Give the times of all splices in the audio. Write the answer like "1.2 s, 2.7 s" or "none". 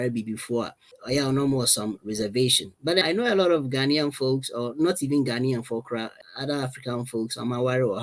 0.9 s, 3.0 s, 6.2 s